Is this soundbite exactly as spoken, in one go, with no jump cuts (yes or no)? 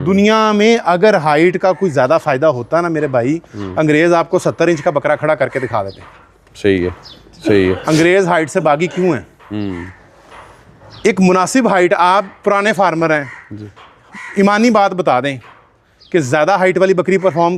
yes